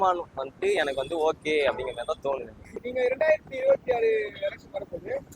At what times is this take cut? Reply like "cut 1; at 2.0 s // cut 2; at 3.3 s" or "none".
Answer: cut 1; at 2.8 s